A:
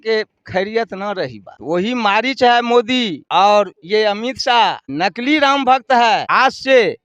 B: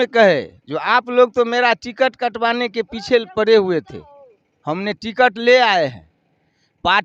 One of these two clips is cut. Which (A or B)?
A